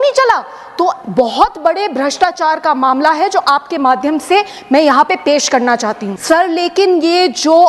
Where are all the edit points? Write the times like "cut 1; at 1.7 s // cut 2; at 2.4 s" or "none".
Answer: cut 1; at 6.1 s